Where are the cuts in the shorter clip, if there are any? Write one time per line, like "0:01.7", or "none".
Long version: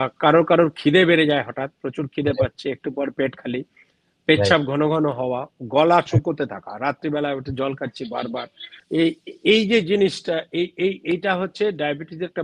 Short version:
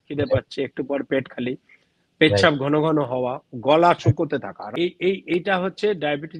0:04.7